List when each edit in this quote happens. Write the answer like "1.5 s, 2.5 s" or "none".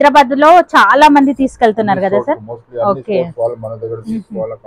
none